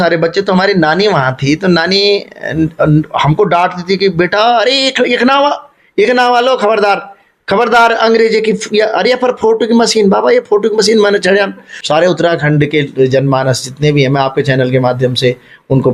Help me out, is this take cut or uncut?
cut